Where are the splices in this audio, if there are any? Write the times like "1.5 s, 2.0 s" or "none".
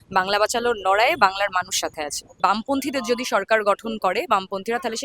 2.2 s